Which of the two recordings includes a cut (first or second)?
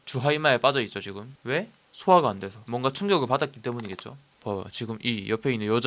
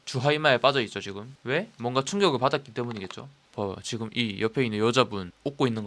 second